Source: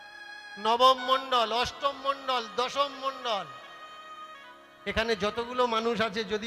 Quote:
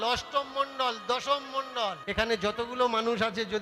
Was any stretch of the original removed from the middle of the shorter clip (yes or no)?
yes